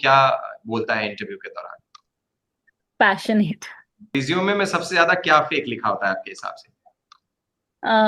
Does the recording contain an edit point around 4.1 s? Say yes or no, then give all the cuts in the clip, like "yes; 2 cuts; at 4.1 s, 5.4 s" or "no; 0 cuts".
yes; 1 cut; at 4.1 s